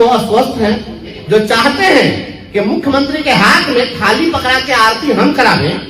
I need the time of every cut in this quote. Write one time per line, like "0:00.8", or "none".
0:01.1